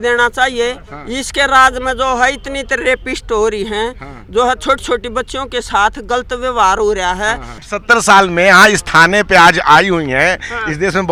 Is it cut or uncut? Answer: uncut